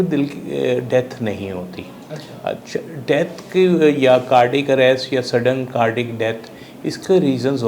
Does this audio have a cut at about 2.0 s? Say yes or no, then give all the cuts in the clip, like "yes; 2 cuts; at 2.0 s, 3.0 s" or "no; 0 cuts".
no; 0 cuts